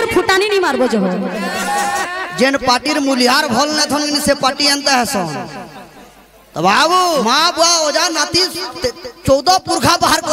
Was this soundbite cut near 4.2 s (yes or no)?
no